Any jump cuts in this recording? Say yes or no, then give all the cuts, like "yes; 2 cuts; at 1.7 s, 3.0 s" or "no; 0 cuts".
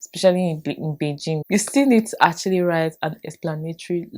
yes; 1 cut; at 1.4 s